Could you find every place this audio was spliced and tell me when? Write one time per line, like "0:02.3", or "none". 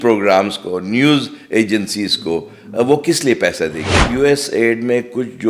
0:04.0